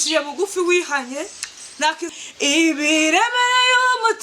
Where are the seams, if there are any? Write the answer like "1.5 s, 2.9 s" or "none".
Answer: 2.1 s

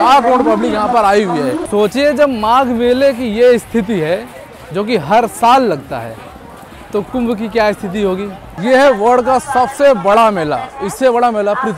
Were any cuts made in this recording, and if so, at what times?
1.6 s, 8.6 s

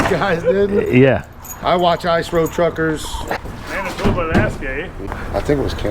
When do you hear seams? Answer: 3.4 s, 5.0 s

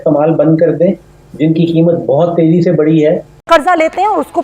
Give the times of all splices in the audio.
3.3 s

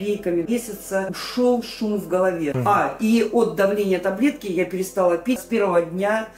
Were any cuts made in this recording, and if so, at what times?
2.5 s, 5.4 s

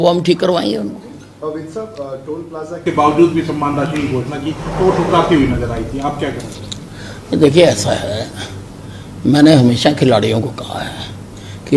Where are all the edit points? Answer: 2.8 s

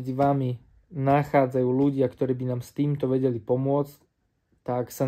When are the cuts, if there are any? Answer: none

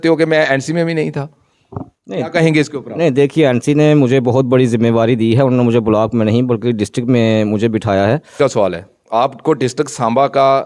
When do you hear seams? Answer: 8.3 s

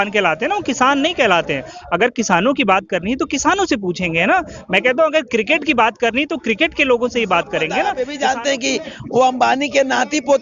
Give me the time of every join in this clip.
8.1 s

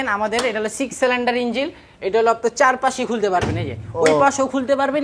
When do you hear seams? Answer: none

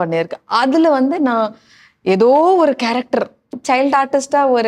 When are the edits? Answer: 3.6 s

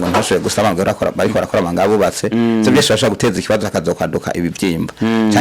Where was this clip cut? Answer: none

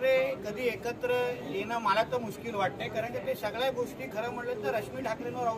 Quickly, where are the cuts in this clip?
none

